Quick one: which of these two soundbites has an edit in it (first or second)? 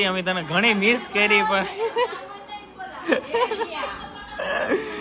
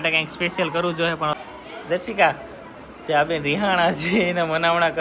second